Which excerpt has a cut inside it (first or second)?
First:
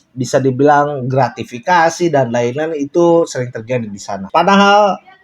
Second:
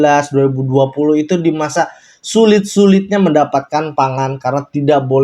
first